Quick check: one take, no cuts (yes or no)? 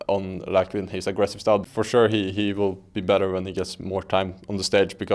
no